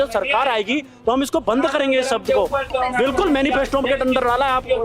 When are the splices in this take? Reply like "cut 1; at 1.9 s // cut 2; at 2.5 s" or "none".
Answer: cut 1; at 2.7 s